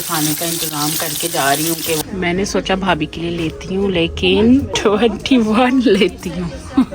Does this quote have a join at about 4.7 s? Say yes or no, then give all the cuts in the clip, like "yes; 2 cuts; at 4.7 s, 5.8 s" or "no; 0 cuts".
yes; 2 cuts; at 2.0 s, 4.7 s